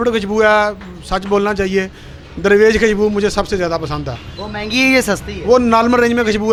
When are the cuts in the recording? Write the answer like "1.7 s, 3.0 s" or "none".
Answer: none